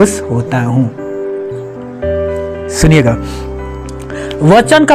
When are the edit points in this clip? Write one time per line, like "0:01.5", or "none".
none